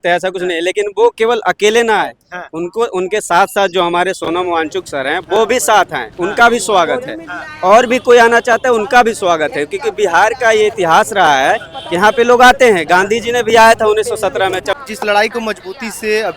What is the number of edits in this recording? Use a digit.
1